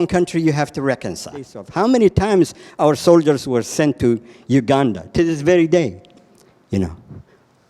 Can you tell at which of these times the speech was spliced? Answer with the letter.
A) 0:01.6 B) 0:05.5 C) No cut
A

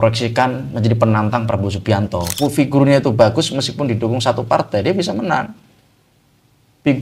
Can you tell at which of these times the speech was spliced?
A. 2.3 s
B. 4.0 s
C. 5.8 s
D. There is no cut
A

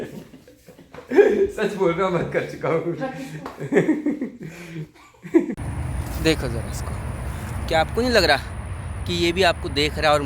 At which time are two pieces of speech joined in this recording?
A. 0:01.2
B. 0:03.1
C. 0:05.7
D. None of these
C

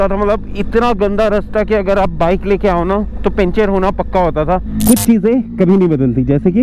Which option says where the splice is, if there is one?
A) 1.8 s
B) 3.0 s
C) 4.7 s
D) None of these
C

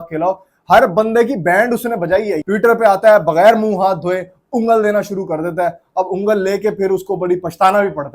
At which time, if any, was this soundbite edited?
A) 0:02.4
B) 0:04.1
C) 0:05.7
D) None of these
A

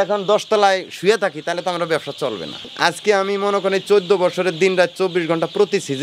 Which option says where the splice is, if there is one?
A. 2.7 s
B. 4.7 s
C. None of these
A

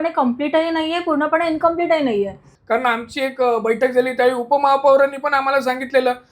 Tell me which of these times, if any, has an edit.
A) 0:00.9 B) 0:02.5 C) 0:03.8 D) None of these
B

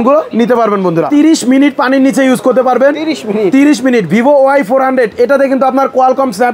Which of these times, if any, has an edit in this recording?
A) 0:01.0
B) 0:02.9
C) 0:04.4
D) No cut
A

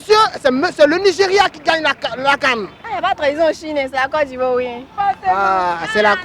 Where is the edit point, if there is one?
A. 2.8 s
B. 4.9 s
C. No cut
A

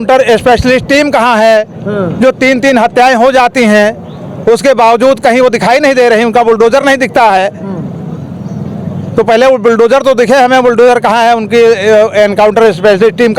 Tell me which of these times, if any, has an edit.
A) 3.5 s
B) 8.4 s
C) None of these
C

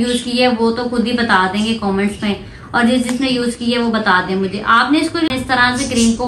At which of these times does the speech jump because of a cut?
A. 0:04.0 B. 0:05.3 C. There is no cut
B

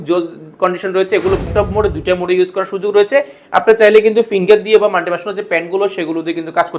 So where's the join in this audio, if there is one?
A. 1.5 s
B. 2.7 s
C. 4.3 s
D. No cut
A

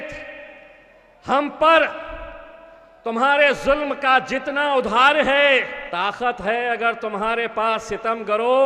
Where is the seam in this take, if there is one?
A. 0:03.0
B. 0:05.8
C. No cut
B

